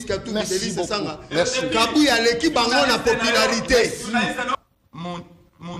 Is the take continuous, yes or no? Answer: no